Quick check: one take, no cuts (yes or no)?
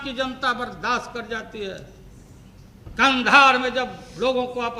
yes